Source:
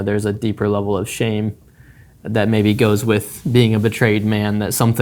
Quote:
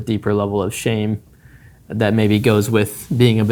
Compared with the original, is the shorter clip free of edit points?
yes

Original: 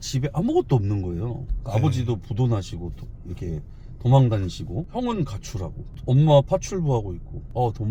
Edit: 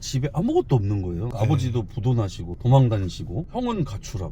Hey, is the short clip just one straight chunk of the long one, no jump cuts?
no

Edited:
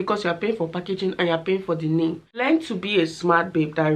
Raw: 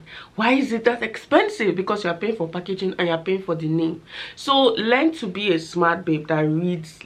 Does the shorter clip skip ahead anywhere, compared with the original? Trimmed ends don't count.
yes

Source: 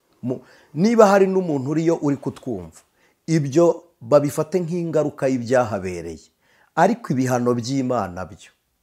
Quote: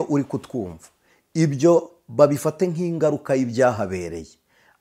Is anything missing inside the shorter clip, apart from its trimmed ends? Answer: no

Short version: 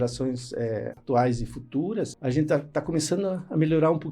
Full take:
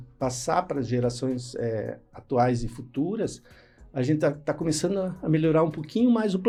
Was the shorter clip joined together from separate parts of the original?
yes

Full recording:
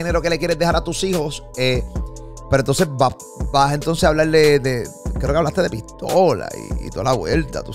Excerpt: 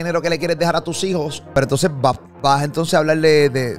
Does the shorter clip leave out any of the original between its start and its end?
yes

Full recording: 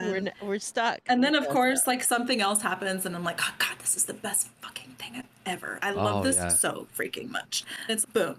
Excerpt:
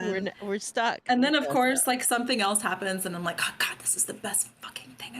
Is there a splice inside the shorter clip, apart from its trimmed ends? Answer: no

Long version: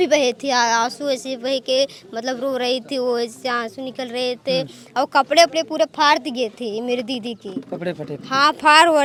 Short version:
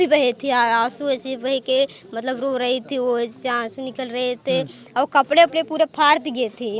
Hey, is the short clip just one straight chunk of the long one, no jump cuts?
yes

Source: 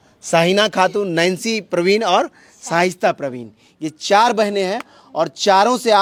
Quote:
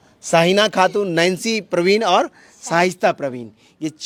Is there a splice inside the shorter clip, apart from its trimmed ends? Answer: no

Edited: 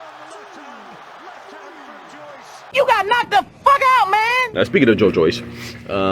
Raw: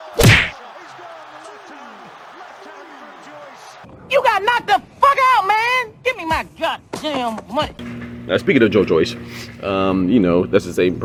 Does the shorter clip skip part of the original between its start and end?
yes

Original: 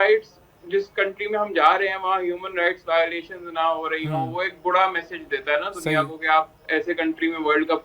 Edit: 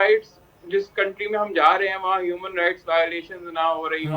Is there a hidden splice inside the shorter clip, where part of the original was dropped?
no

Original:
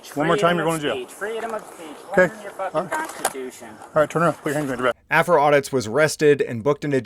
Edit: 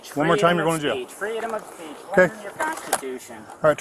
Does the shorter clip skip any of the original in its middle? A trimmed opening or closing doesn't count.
yes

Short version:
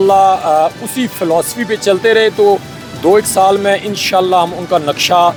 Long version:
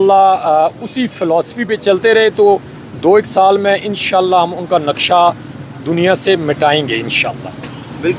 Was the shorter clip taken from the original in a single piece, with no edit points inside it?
yes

